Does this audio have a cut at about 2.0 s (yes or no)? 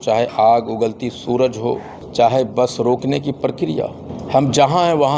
yes